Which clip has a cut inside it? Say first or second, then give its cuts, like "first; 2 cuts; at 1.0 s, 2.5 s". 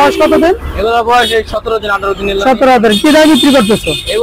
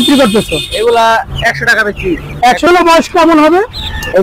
second; 1 cut; at 2.7 s